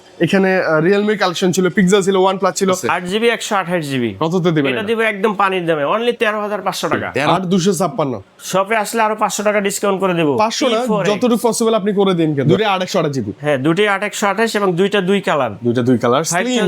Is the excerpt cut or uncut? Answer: cut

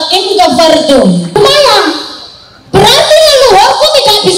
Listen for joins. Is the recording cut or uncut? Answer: cut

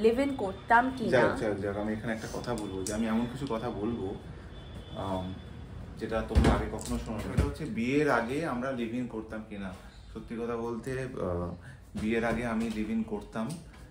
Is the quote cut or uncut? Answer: uncut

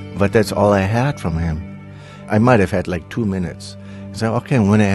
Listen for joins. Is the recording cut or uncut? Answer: cut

